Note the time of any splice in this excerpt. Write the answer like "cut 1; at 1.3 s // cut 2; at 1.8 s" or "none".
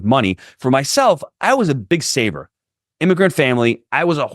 cut 1; at 1.8 s